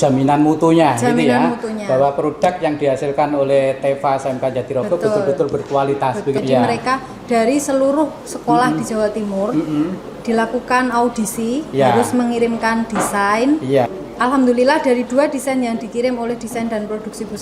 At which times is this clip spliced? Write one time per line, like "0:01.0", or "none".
0:06.4
0:13.9